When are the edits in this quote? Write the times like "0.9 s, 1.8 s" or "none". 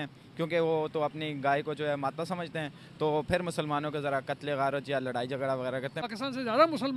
6.0 s